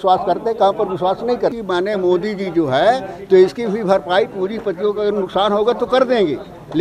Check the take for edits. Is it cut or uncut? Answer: cut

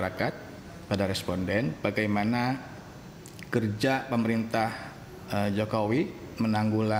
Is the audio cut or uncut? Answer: uncut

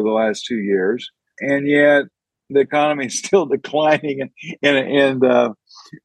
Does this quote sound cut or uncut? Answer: cut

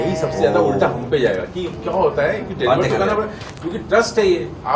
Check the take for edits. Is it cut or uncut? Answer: uncut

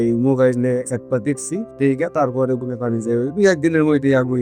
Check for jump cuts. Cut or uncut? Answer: uncut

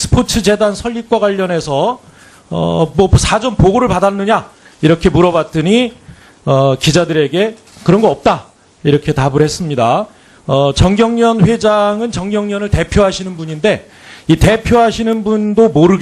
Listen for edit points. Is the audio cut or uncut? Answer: uncut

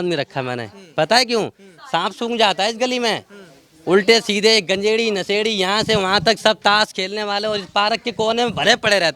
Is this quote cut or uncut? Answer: uncut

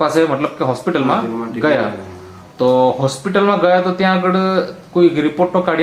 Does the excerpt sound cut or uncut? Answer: uncut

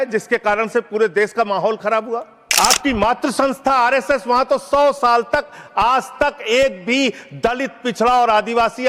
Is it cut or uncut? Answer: cut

